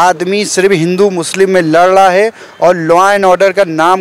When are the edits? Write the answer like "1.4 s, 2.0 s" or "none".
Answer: none